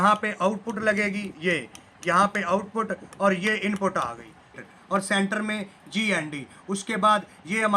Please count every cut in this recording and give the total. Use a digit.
1